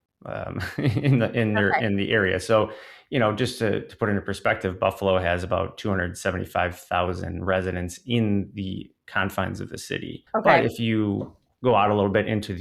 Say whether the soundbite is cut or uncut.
uncut